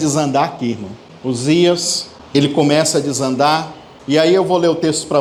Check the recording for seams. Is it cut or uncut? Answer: uncut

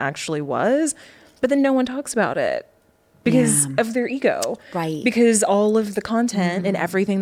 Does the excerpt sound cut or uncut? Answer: uncut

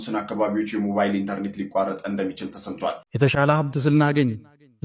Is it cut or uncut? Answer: cut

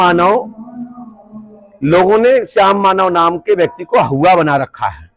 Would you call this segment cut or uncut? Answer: uncut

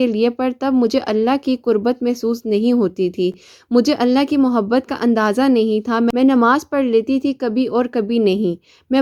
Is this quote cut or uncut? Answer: uncut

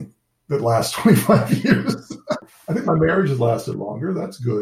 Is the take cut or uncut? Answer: cut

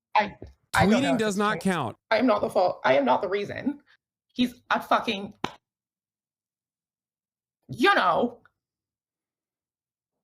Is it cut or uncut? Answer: cut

